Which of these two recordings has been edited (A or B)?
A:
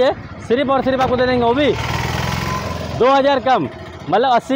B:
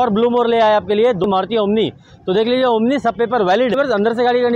B